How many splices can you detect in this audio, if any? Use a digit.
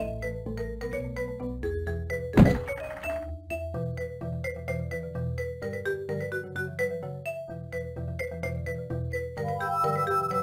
0